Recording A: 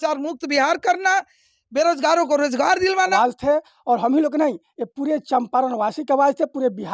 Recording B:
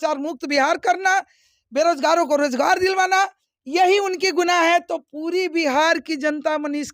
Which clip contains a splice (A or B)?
A